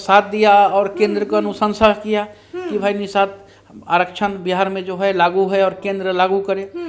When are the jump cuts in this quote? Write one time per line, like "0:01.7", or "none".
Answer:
none

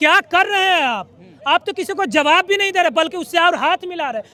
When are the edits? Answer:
none

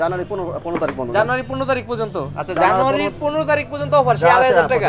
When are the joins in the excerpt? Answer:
none

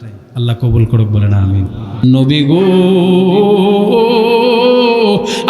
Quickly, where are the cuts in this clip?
0:02.0

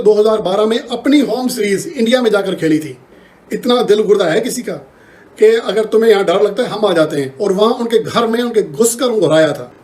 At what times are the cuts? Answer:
none

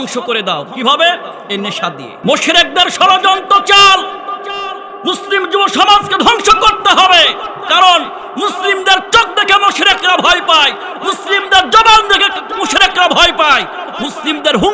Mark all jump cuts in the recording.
0:02.1

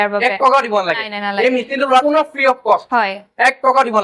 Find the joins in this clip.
0:02.0

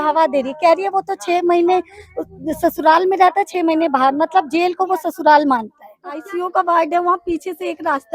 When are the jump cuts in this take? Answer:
0:06.3

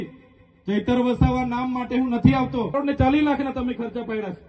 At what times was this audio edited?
0:02.7

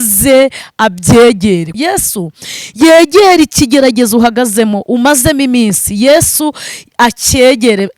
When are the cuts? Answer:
0:01.7

